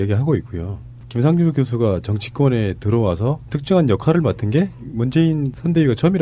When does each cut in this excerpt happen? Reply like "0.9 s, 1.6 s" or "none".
none